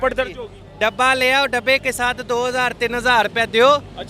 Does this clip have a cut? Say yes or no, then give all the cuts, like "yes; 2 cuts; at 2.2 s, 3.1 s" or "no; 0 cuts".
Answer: no; 0 cuts